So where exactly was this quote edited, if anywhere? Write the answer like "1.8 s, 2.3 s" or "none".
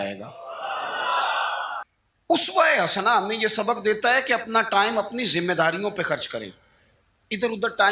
1.8 s

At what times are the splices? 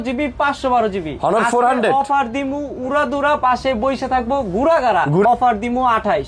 5.2 s

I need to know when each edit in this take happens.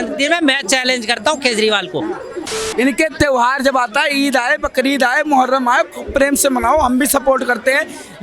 2.6 s

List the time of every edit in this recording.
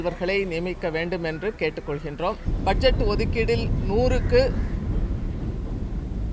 2.5 s

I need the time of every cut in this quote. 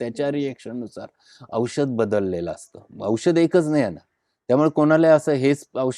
none

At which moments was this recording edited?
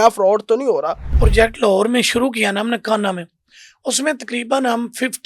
1.2 s

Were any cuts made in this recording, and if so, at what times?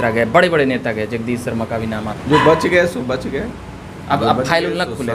2.1 s

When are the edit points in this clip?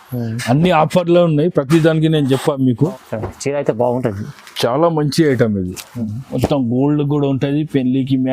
2.8 s

